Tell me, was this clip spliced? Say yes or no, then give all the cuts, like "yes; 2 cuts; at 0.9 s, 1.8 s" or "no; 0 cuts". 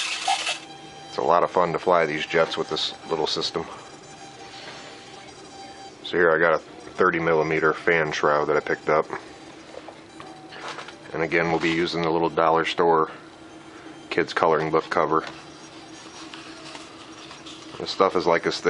yes; 1 cut; at 9.0 s